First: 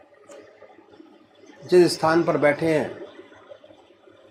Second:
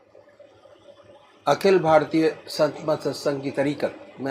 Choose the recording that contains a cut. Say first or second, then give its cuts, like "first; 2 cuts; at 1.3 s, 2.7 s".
second; 1 cut; at 2.1 s